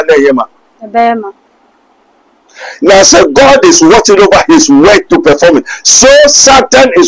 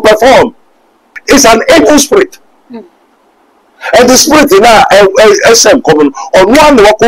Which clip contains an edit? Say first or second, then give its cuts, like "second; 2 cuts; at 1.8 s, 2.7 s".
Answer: second; 1 cut; at 1.2 s